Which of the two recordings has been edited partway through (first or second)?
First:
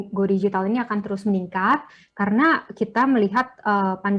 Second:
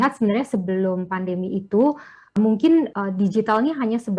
second